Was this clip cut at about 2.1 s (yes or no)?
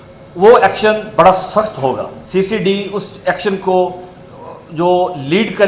yes